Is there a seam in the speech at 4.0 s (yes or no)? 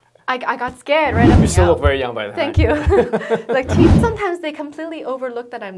yes